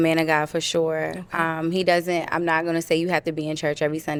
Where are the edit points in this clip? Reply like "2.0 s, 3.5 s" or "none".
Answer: none